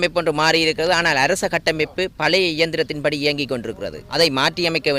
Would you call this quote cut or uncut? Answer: cut